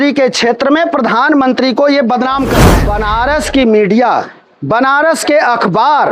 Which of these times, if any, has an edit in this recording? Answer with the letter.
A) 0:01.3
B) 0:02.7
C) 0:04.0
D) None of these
B